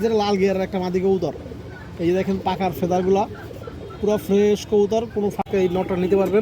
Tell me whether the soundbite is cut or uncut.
cut